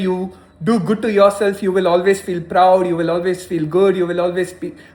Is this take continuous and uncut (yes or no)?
yes